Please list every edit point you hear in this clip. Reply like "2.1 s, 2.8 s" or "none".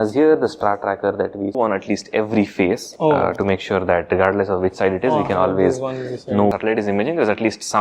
1.6 s, 6.5 s